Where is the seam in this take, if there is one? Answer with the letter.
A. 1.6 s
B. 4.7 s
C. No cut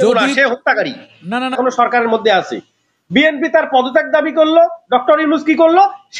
A